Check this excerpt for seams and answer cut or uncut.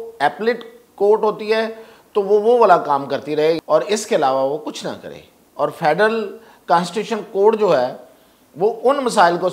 cut